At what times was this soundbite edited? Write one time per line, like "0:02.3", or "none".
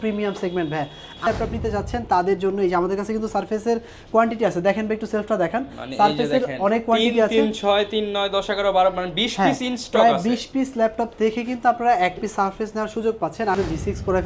0:01.2
0:13.6